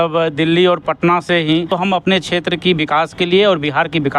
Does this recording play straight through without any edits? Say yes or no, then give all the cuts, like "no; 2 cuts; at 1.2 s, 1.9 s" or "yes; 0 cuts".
no; 1 cut; at 1.7 s